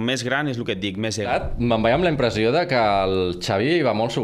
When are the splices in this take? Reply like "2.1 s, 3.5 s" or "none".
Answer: 1.3 s